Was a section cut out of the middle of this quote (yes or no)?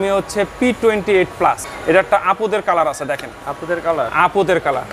yes